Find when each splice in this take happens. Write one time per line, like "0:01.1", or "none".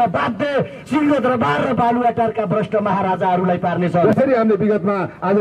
0:04.0